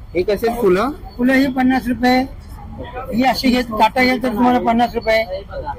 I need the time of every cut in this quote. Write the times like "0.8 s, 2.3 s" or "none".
none